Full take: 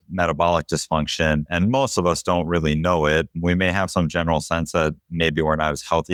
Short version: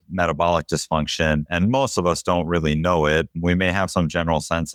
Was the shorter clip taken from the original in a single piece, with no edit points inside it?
yes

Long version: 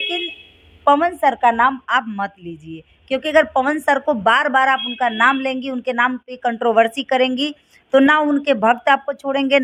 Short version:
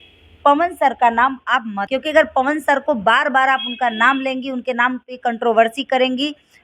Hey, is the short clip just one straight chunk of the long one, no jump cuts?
no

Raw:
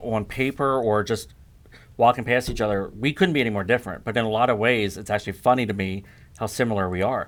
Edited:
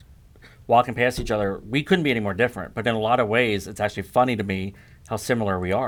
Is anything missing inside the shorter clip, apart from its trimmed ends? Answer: no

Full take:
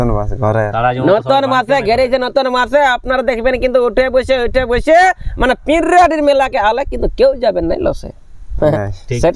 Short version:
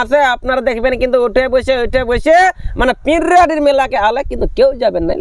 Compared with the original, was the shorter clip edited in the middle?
no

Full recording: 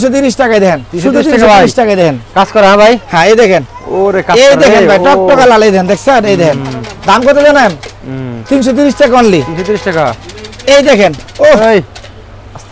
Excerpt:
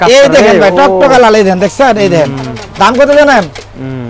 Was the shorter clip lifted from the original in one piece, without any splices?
yes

